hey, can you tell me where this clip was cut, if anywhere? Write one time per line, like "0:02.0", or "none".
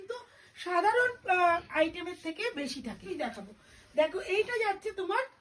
0:03.1